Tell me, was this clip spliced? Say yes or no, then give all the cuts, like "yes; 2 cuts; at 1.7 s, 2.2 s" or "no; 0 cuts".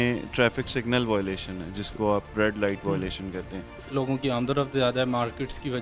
yes; 1 cut; at 3.9 s